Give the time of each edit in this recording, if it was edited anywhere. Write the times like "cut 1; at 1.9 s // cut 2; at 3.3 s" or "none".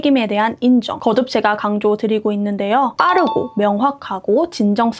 cut 1; at 0.9 s // cut 2; at 3.0 s